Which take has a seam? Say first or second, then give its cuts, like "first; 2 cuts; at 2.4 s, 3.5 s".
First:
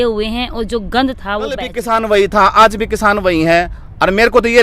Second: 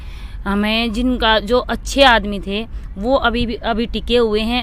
first; 1 cut; at 1.7 s